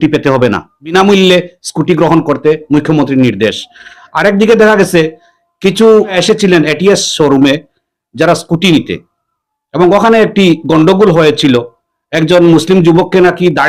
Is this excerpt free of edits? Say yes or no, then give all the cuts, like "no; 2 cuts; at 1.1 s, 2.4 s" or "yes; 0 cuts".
yes; 0 cuts